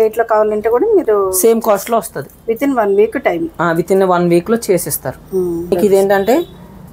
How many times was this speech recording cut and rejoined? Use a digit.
1